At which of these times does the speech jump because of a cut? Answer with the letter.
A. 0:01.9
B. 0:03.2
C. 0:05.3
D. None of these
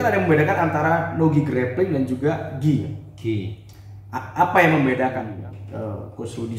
C